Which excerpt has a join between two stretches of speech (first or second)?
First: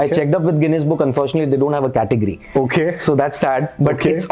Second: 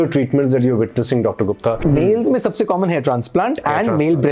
second